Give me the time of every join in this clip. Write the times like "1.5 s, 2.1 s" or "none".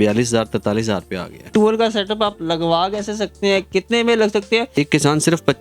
1.5 s, 4.8 s